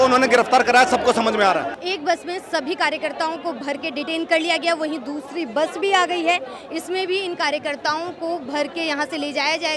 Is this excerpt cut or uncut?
uncut